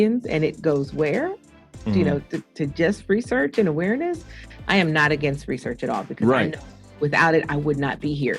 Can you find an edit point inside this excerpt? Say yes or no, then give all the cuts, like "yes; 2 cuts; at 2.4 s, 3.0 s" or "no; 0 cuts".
yes; 1 cut; at 4.4 s